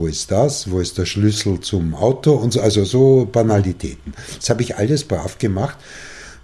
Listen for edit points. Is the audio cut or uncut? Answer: uncut